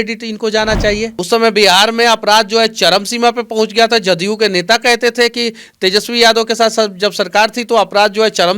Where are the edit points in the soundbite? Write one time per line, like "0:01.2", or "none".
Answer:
0:01.1